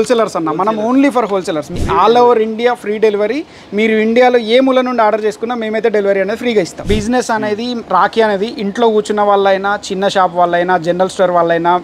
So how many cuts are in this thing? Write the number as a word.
two